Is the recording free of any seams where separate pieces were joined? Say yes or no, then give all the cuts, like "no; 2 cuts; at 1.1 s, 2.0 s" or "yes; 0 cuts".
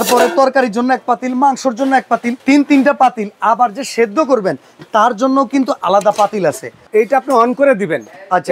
no; 2 cuts; at 2.3 s, 6.9 s